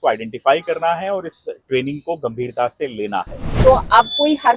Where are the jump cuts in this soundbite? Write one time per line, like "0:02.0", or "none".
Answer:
0:03.4